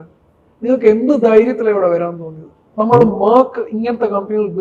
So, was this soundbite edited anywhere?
no; 0 cuts

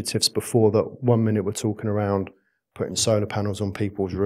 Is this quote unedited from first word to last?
yes; 0 cuts

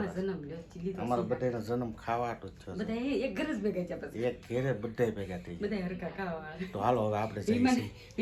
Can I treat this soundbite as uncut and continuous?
yes; 0 cuts

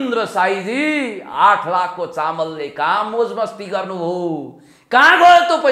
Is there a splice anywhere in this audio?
no; 0 cuts

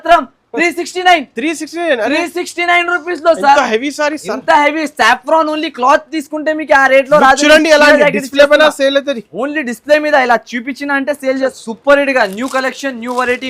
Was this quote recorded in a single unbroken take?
no; 1 cut; at 11.5 s

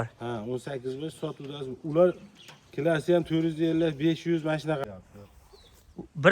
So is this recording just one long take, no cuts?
no; 1 cut; at 4.8 s

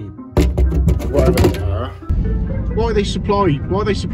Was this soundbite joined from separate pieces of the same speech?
yes; 1 cut; at 2.1 s

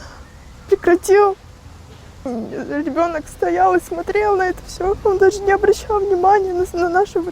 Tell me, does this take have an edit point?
yes; 1 cut; at 2.3 s

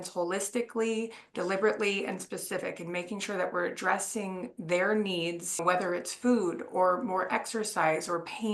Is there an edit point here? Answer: yes; 1 cut; at 5.6 s

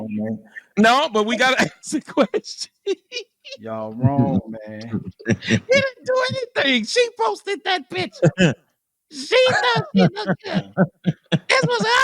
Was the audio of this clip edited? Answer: no; 0 cuts

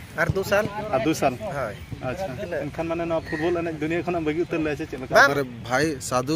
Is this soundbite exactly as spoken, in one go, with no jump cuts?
no; 2 cuts; at 2.4 s, 5.3 s

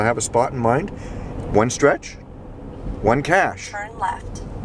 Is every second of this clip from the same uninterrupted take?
yes; 0 cuts

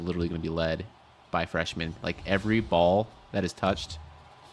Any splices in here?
no; 0 cuts

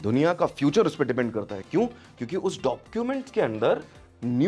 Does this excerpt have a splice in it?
no; 0 cuts

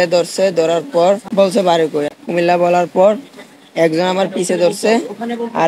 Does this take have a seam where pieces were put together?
yes; 2 cuts; at 1.2 s, 2.1 s

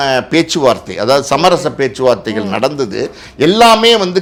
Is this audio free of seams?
yes; 0 cuts

